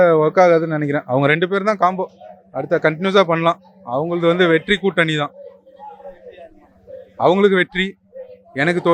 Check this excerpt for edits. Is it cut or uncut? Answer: uncut